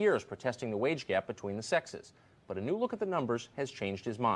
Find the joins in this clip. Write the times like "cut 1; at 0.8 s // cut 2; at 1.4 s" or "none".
none